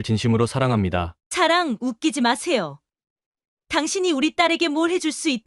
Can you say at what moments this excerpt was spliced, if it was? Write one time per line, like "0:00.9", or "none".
0:01.2